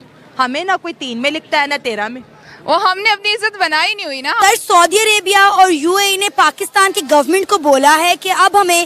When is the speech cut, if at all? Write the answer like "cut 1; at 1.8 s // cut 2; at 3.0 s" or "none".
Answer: cut 1; at 4.4 s